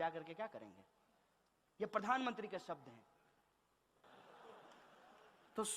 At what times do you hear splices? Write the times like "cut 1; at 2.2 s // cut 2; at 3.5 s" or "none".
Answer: none